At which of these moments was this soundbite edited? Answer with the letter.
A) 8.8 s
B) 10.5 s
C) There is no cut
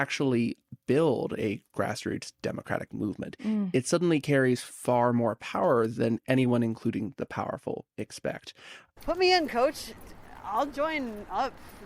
A